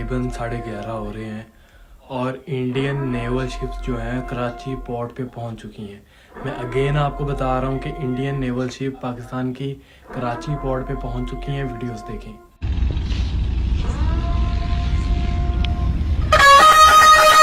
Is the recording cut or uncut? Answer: uncut